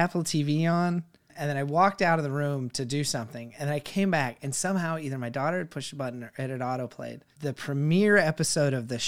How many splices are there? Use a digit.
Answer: 2